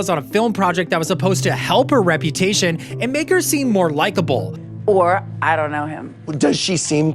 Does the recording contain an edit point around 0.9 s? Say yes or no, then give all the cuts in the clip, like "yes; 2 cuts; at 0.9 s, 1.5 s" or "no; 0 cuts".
no; 1 cut; at 4.6 s